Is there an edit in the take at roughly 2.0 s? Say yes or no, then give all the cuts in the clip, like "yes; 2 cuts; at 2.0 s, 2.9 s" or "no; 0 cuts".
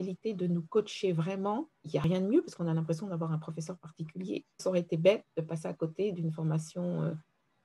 yes; 2 cuts; at 2.0 s, 4.6 s